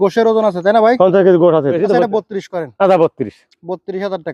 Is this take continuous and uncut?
no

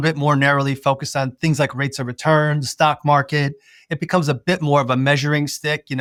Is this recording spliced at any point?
no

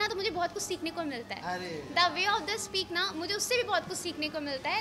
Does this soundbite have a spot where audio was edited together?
no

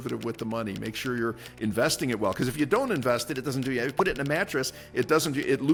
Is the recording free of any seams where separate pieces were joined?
yes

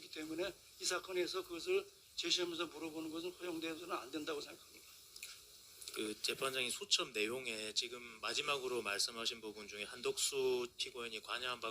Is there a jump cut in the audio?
no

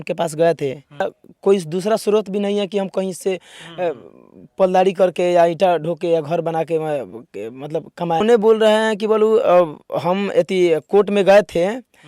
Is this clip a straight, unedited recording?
no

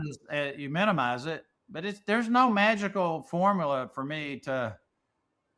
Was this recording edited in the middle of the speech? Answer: no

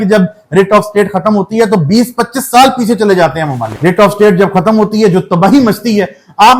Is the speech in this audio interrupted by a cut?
yes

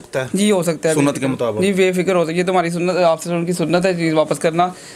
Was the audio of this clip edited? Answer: no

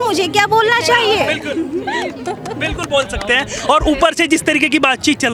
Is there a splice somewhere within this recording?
no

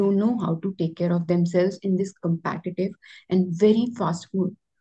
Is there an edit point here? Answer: no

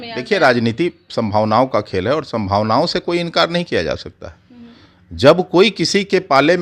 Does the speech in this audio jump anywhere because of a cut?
no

